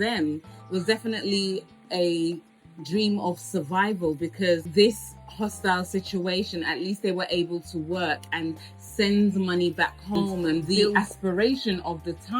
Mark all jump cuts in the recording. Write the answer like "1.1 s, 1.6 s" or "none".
10.9 s